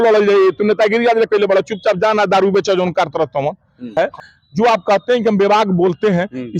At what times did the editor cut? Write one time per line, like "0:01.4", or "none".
0:03.9